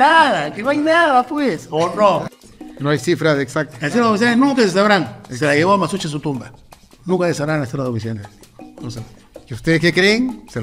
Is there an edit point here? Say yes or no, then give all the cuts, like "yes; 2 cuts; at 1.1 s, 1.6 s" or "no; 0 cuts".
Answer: yes; 1 cut; at 2.2 s